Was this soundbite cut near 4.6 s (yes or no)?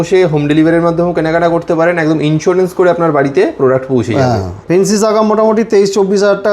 yes